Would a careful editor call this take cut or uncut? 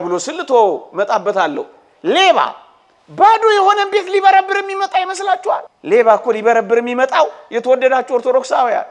cut